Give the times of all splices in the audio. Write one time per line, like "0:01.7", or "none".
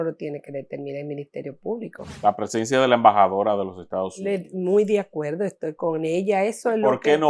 0:02.0